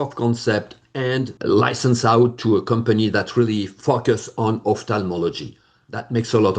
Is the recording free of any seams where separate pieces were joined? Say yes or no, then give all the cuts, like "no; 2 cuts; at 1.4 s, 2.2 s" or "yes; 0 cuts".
no; 1 cut; at 1.3 s